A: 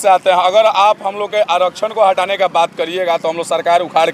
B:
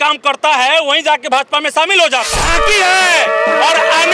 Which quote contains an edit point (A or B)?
B